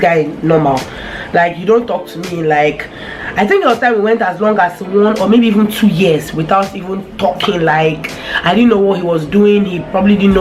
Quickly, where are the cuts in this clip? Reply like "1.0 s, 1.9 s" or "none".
none